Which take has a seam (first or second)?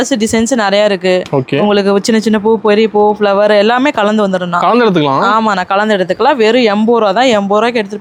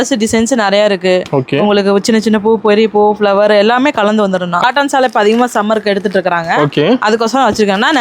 second